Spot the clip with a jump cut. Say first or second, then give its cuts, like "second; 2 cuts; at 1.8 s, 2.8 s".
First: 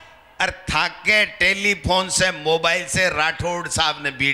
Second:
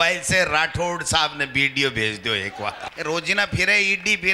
second; 1 cut; at 2.8 s